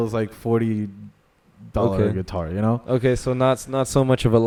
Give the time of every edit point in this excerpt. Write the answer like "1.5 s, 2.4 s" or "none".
none